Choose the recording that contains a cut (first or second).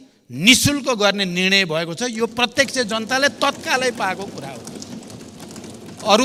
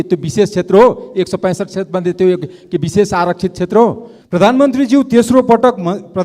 second